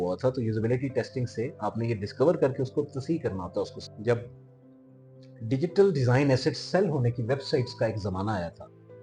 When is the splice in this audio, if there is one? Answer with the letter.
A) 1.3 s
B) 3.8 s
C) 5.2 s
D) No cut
B